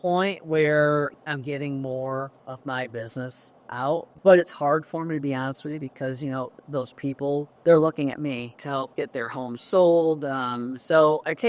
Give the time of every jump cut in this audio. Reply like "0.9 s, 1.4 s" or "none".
1.1 s, 2.4 s, 4.1 s, 7.5 s, 8.6 s

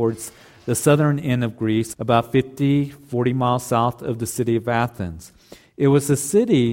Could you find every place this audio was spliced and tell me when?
1.9 s

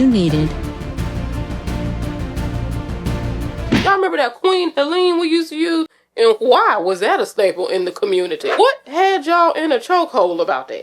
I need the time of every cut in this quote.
3.8 s, 8.4 s

